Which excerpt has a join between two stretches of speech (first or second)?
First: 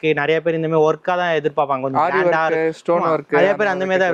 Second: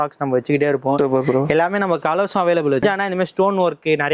second